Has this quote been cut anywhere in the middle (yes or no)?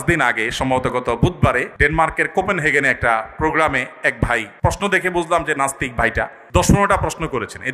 yes